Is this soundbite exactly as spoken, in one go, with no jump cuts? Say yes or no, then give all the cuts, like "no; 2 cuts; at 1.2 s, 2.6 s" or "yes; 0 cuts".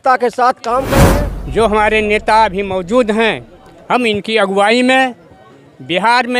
no; 1 cut; at 0.9 s